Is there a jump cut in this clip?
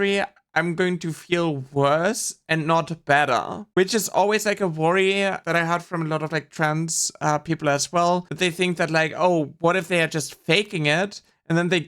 yes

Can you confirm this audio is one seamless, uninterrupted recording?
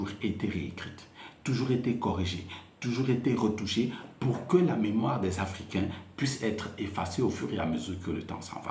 yes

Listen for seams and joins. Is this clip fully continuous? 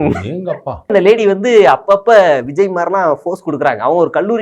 no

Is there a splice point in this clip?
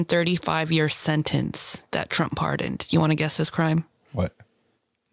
no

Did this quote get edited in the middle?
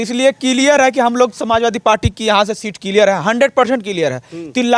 no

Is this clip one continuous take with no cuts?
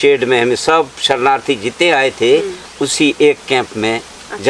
yes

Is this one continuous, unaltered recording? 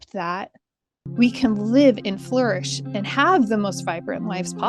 yes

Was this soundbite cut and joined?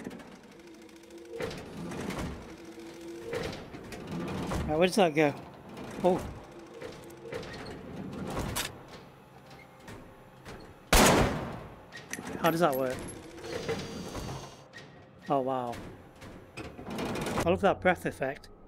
yes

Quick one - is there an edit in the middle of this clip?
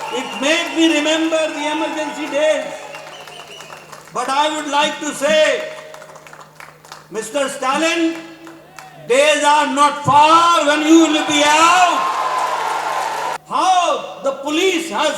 yes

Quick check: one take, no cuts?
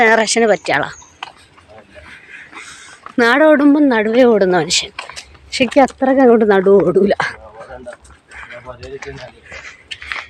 yes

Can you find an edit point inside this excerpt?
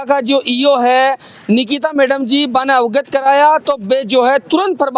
no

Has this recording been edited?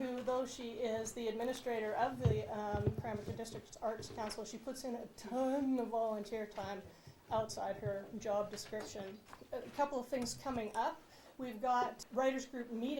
yes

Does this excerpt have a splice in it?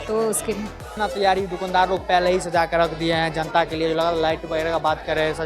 yes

